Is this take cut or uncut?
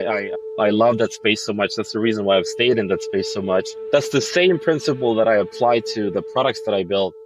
uncut